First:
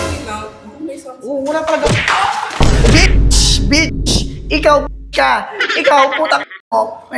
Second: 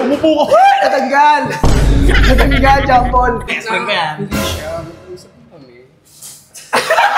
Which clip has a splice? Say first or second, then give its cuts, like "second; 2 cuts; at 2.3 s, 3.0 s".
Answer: second; 1 cut; at 3.6 s